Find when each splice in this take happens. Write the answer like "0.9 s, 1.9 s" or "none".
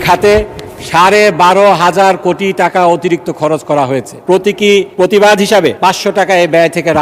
4.1 s, 4.9 s, 5.8 s